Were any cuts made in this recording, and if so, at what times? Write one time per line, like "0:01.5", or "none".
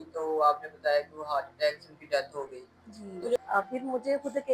0:03.4